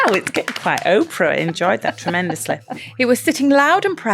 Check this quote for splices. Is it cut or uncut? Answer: cut